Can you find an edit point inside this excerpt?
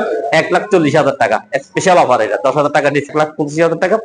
yes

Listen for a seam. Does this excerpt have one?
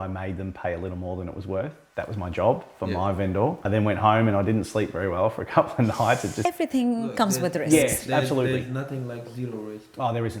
yes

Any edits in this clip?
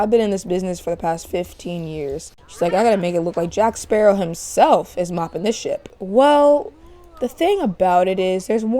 yes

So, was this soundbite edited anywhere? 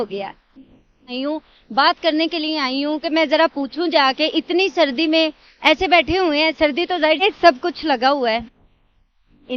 yes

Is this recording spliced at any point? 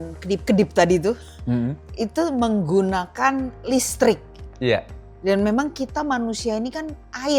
no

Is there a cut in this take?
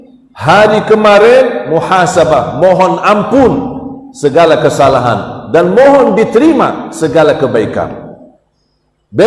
no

